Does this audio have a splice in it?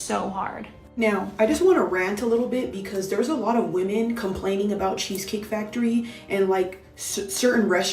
yes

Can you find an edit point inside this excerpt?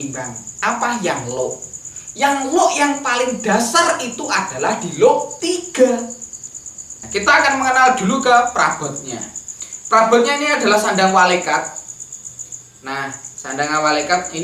yes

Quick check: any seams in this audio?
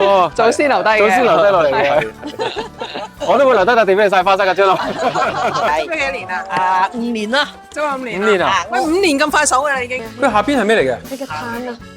yes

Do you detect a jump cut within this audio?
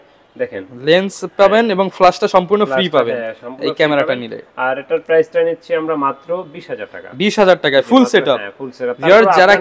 no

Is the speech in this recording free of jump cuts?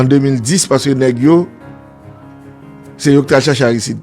no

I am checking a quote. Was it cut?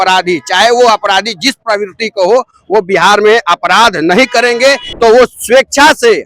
yes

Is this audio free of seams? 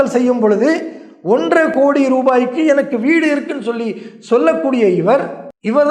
yes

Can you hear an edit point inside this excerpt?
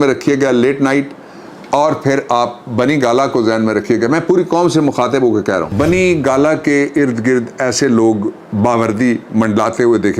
yes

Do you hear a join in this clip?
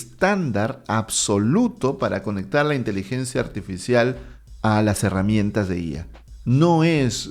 no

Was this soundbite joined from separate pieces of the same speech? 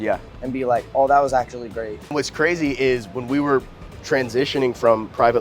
yes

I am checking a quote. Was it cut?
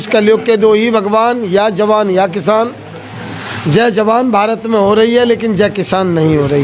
no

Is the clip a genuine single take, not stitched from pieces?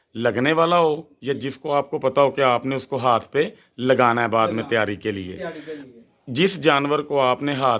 yes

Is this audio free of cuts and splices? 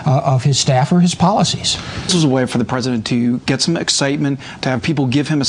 no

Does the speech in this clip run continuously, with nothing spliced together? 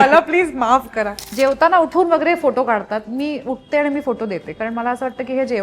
no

